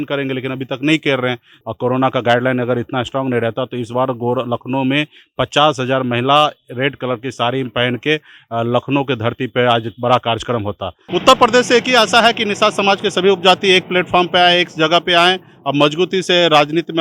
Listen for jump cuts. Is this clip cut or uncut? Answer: cut